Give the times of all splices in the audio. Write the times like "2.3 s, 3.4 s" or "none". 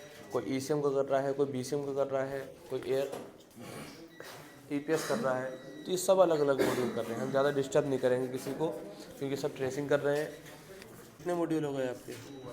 11.2 s

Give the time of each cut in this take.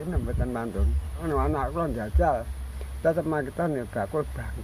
1.2 s

